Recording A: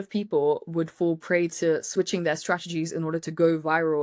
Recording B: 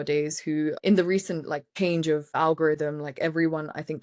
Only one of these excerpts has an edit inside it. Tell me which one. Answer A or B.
B